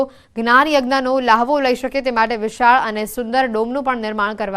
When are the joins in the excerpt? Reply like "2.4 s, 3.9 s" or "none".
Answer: 3.2 s

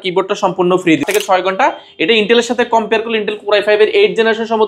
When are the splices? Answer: 1.0 s

